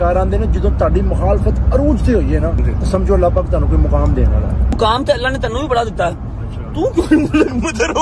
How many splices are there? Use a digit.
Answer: 2